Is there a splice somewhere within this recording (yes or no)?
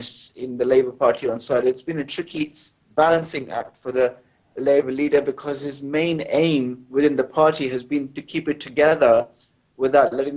yes